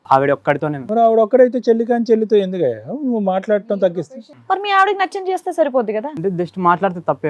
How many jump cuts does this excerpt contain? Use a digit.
1